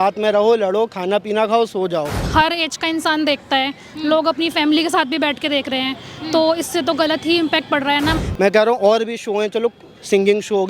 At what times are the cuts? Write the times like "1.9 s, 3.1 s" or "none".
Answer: 2.2 s, 8.2 s